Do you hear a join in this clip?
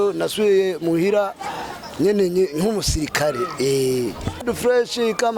yes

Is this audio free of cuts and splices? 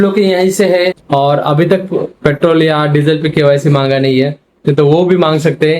no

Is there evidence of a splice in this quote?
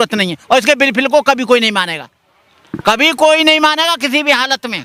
no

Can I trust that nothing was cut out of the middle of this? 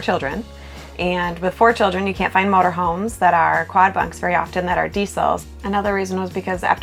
yes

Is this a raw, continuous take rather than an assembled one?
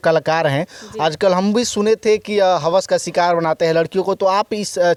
yes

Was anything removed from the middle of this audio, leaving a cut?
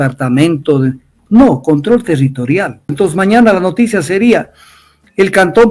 yes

